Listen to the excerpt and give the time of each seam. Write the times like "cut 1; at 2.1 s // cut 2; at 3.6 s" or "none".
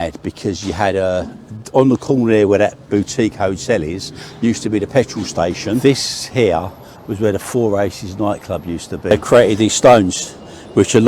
cut 1; at 5.8 s // cut 2; at 9.1 s